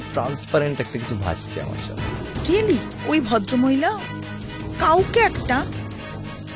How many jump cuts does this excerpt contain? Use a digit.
1